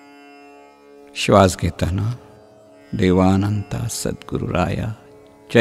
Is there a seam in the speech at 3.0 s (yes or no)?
no